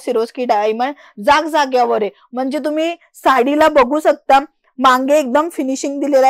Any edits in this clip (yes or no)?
no